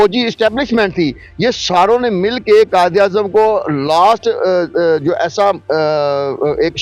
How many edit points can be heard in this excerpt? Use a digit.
0